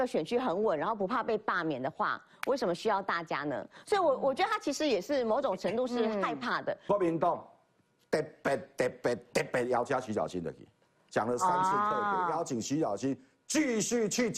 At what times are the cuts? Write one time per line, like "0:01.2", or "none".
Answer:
0:06.8